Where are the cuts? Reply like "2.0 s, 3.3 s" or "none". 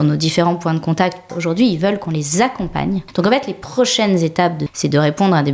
1.3 s, 3.1 s, 4.7 s